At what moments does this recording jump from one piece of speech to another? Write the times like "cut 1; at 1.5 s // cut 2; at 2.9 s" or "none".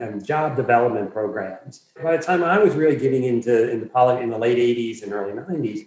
cut 1; at 2.0 s